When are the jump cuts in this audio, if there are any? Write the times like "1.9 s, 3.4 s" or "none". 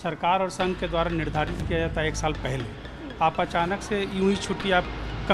none